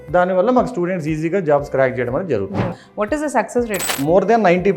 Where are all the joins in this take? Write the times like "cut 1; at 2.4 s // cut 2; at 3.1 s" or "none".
cut 1; at 2.8 s // cut 2; at 4.0 s